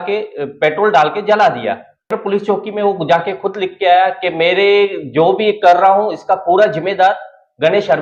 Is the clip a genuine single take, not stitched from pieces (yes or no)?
no